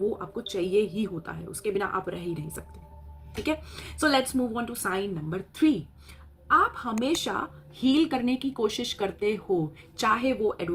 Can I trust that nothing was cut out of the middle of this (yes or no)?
no